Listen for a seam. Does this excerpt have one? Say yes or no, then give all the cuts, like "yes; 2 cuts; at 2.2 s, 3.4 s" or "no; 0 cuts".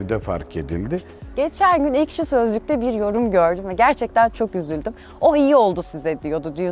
yes; 1 cut; at 1.2 s